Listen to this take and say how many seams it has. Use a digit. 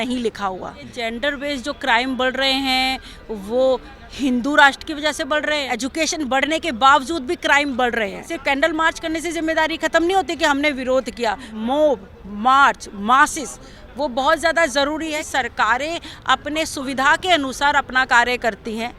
5